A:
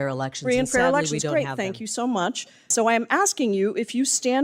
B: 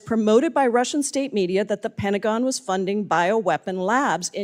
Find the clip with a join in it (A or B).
A